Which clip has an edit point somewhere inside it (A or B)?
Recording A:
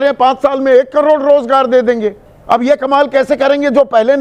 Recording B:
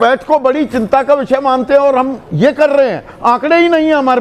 A